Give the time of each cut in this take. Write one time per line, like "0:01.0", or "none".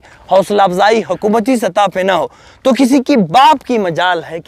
none